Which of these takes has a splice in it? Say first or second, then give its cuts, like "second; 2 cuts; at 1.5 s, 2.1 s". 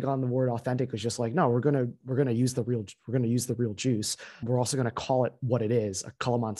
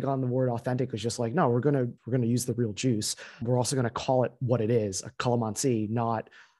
second; 1 cut; at 2.0 s